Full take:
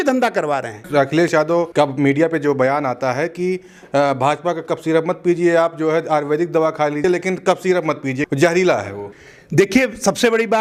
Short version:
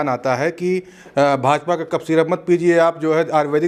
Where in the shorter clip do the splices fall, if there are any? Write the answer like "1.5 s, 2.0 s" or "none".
none